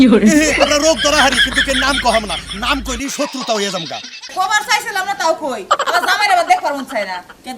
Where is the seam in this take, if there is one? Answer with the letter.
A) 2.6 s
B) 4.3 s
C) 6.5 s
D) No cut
B